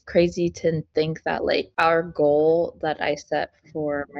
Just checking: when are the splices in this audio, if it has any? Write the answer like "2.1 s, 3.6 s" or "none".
none

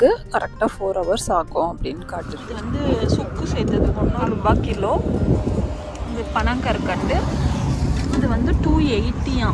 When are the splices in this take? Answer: 2.4 s

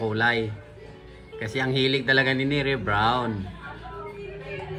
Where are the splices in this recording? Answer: none

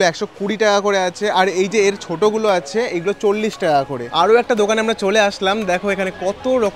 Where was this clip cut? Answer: 4.0 s

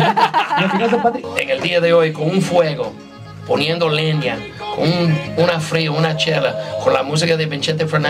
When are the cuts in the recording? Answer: 1.2 s

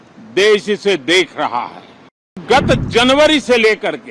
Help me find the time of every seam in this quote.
2.4 s

